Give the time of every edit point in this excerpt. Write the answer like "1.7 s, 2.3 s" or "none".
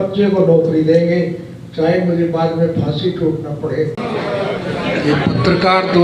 4.0 s